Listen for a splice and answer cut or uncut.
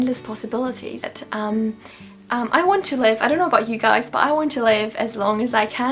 cut